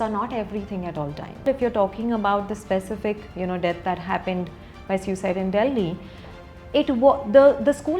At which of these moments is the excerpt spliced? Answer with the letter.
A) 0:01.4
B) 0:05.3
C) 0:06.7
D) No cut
A